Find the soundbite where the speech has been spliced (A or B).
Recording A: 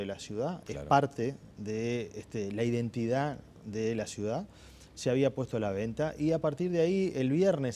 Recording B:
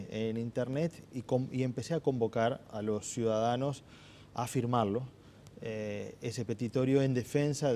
A